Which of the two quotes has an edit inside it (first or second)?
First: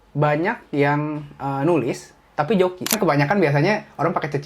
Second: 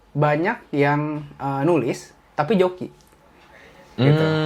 first